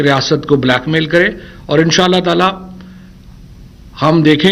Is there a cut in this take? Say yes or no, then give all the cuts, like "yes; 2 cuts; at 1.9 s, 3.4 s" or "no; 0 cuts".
no; 0 cuts